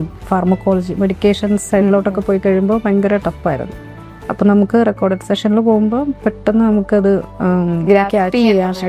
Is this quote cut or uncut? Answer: uncut